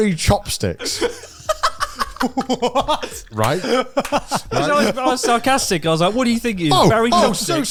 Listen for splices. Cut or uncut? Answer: uncut